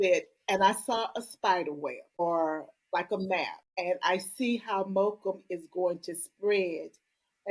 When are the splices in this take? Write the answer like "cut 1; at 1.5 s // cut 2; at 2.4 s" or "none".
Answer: cut 1; at 3.6 s

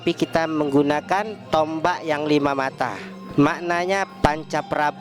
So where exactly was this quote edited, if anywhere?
cut 1; at 4.1 s

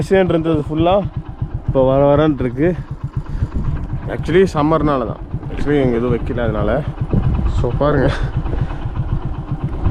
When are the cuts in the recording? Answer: none

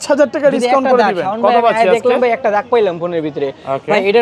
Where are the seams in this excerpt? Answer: none

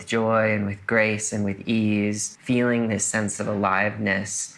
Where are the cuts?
cut 1; at 2.3 s

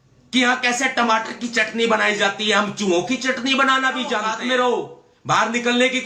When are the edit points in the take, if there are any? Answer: cut 1; at 4.3 s

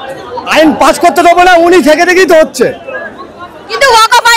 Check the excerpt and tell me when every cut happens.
none

